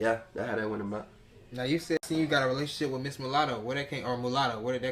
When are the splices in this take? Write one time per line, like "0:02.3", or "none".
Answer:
0:02.0